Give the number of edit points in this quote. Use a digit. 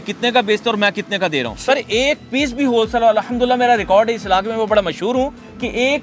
1